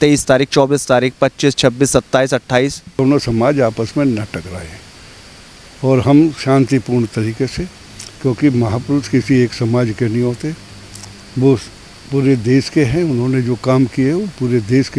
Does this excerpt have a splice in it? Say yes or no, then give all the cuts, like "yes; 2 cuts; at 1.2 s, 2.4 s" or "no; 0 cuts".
yes; 1 cut; at 3.0 s